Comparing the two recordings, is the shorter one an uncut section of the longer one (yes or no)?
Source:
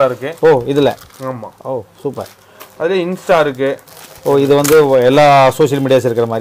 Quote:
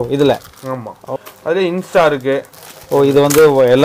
no